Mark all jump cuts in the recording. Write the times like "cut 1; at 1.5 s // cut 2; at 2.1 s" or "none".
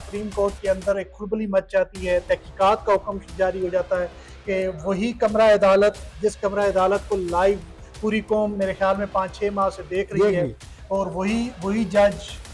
none

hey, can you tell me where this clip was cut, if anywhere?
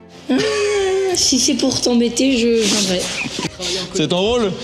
none

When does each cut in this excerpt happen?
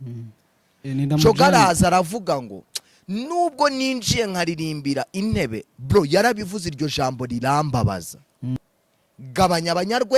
cut 1; at 8.6 s

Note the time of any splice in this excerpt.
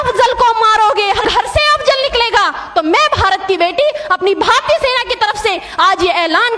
cut 1; at 1.2 s

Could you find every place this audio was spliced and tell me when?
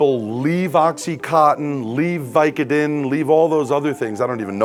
none

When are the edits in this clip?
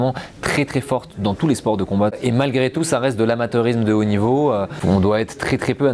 cut 1; at 2.1 s // cut 2; at 4.7 s

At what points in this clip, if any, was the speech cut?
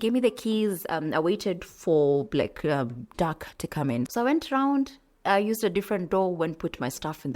cut 1; at 4.1 s

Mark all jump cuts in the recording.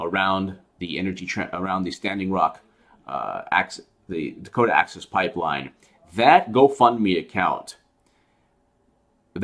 cut 1; at 4.4 s

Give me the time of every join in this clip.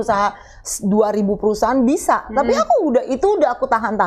none

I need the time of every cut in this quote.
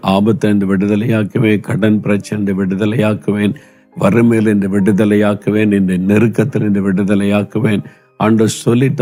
none

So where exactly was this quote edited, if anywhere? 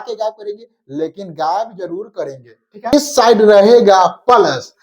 cut 1; at 2.9 s

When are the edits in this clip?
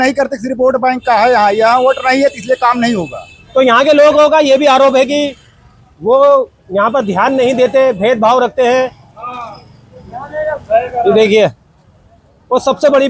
none

